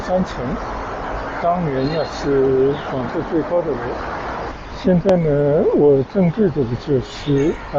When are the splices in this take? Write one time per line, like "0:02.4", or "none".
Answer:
0:04.5